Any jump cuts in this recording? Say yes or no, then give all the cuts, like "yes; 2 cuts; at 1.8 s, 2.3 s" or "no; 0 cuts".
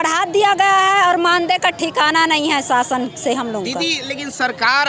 no; 0 cuts